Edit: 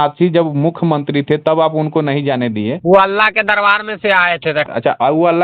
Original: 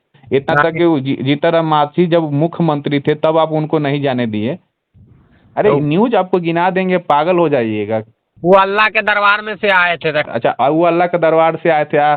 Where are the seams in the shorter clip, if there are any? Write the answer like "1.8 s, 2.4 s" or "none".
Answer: 2.8 s